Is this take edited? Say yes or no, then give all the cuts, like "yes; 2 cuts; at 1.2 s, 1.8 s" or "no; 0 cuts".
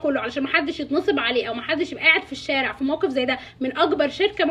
no; 0 cuts